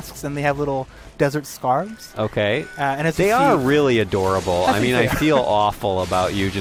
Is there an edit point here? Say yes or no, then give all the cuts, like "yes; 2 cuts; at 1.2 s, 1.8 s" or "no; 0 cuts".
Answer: no; 0 cuts